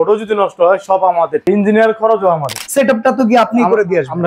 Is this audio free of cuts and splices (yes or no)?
no